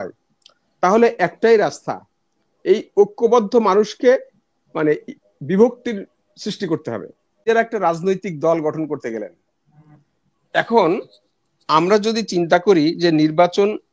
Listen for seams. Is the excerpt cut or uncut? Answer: cut